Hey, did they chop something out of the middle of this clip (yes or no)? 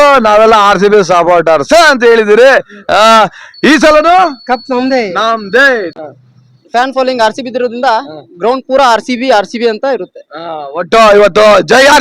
yes